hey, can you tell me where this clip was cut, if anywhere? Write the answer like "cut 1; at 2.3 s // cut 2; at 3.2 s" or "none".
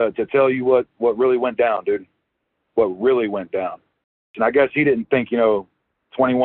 cut 1; at 4.3 s